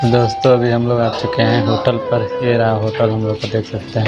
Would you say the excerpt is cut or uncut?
uncut